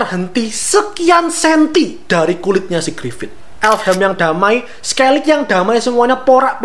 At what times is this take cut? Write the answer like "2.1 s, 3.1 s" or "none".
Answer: 3.4 s